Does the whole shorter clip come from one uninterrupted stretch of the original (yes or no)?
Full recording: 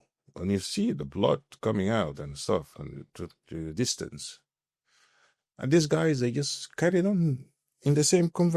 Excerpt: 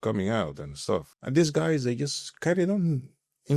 no